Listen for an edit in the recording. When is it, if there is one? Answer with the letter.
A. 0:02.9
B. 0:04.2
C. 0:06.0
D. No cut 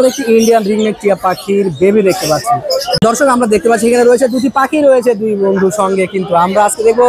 A